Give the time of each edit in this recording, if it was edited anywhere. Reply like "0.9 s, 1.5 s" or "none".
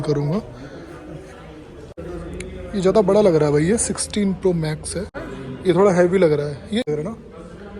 1.9 s, 5.1 s, 6.9 s